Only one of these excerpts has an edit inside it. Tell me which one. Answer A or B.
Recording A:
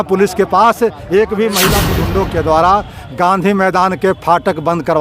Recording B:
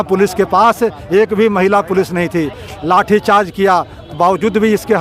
A